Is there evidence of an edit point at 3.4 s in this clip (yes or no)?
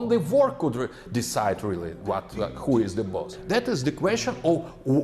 yes